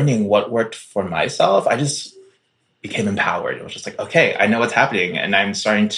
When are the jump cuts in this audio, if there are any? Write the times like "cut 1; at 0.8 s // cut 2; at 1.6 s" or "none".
none